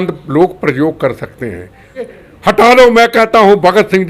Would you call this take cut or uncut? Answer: cut